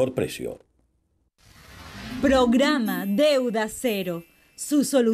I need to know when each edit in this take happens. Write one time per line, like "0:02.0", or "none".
0:02.1